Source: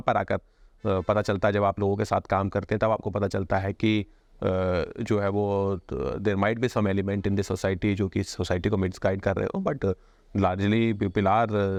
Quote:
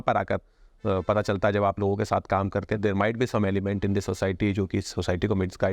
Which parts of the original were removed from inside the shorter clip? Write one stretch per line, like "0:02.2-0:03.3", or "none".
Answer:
0:02.8-0:06.2